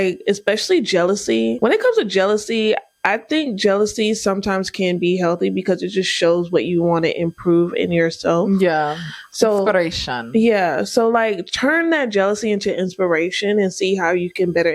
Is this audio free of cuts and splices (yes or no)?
no